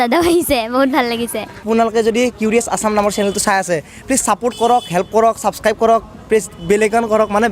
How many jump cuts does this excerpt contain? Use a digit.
1